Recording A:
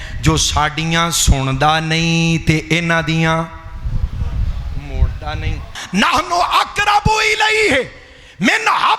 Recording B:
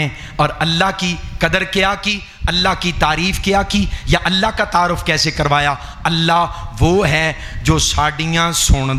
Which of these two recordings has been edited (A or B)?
A